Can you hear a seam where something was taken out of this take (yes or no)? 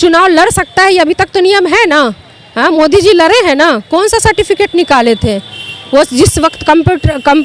no